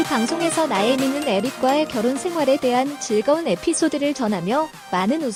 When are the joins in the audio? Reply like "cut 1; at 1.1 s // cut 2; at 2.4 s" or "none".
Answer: none